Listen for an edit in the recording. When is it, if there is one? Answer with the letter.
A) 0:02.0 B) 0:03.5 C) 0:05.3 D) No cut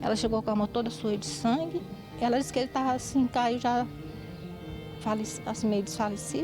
A